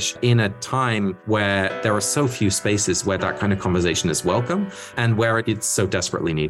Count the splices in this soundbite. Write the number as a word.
one